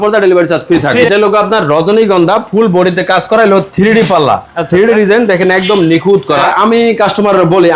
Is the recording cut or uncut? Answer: cut